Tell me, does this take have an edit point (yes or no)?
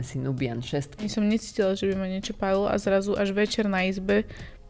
yes